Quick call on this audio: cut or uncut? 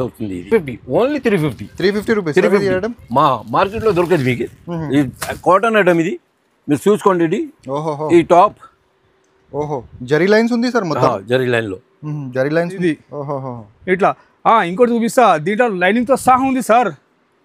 cut